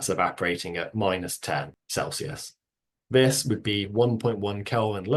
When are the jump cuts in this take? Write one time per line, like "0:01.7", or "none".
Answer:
0:01.8